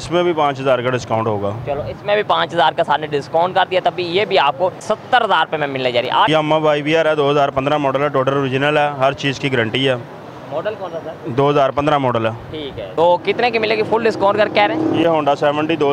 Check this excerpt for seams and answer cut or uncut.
cut